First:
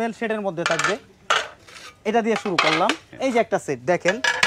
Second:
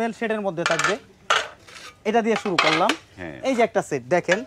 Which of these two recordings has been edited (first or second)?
first